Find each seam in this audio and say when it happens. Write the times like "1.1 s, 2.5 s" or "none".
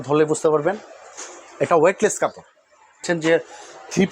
3.0 s